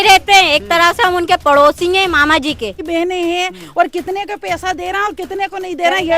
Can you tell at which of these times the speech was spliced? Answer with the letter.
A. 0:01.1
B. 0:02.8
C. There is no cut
B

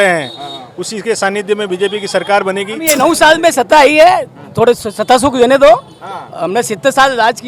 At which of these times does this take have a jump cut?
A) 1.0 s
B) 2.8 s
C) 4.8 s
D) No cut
B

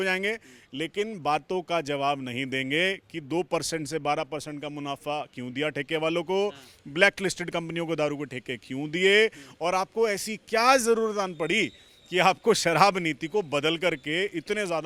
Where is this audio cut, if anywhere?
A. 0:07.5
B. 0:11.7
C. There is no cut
C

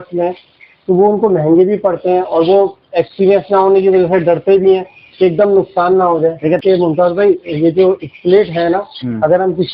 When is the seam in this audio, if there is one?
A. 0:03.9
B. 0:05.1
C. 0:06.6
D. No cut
C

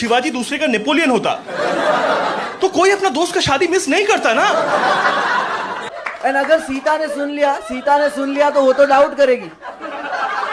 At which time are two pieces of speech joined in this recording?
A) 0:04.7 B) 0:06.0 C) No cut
B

